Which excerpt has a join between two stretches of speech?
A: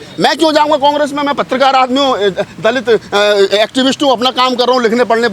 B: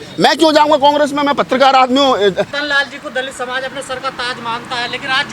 B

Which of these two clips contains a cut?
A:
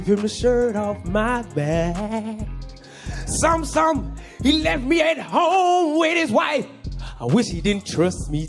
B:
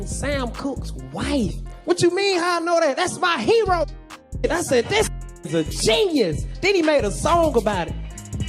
B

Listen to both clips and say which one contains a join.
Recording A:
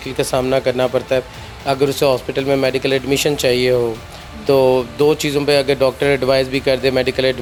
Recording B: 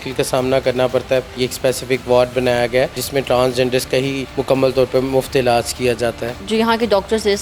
B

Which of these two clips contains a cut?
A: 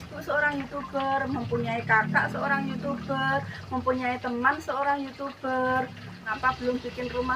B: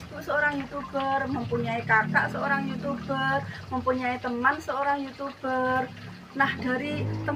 A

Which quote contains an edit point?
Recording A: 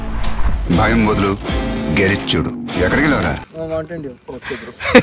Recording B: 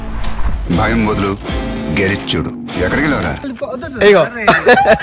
B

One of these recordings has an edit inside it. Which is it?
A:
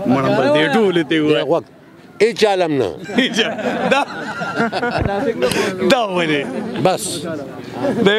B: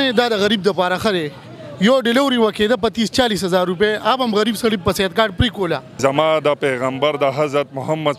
B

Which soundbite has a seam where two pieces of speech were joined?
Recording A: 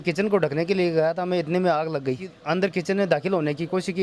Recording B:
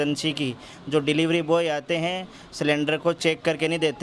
A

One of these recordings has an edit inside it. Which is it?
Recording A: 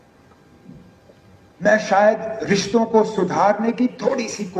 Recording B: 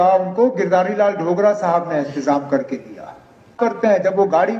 B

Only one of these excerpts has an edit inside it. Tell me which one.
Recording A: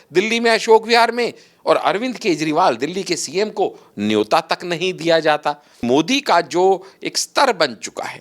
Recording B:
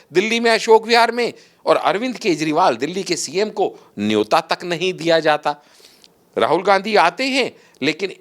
A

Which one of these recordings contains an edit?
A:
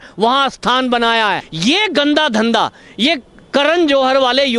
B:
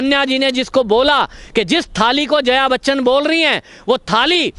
A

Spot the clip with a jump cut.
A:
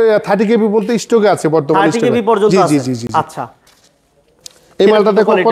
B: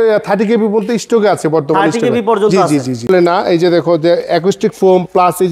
B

